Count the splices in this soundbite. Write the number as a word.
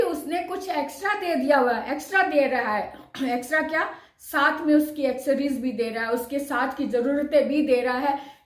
zero